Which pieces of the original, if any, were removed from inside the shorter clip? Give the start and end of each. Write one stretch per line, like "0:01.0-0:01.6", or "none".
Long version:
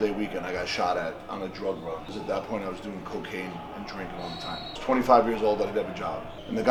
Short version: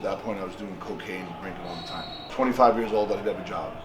0:04.0-0:04.2